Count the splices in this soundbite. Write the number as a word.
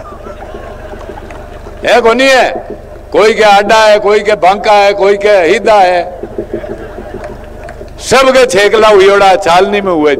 zero